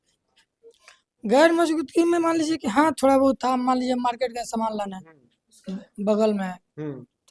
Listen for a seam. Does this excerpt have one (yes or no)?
no